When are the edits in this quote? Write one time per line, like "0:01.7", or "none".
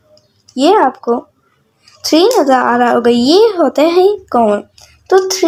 none